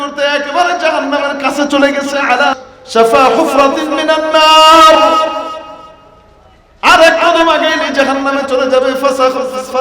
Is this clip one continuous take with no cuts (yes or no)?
no